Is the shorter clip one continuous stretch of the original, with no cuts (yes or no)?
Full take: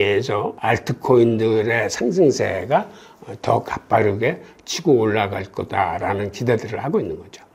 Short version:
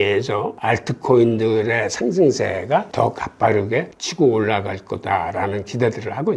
no